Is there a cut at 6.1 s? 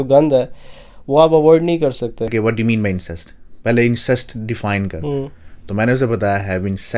no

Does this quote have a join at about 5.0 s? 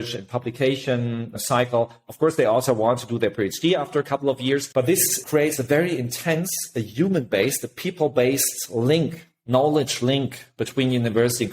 yes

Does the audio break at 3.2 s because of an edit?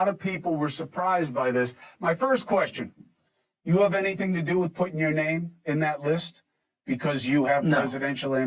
no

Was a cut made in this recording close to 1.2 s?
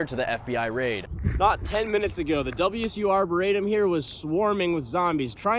yes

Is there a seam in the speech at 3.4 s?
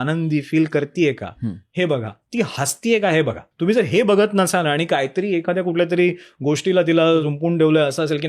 yes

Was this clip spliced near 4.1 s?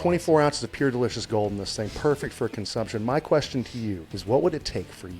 yes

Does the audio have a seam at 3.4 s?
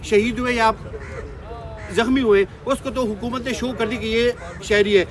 no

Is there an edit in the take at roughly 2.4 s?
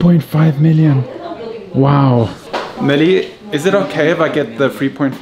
yes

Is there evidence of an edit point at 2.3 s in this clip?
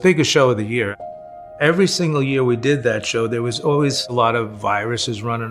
no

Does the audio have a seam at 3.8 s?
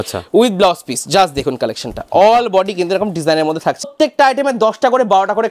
yes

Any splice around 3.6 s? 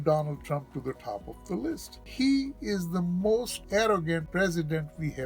yes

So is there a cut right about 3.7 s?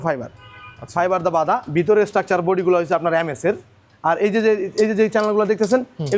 no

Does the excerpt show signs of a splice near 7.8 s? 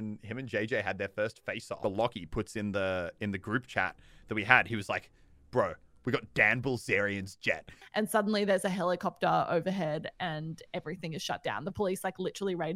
yes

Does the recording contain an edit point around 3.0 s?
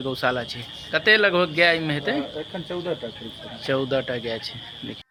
no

